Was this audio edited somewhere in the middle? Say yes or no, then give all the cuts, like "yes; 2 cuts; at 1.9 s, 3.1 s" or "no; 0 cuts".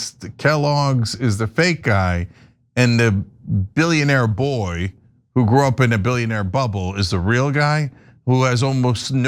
no; 0 cuts